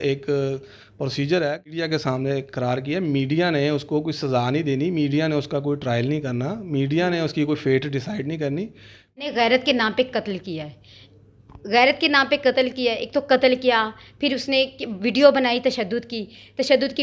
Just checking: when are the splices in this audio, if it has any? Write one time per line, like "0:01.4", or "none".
0:01.7
0:09.2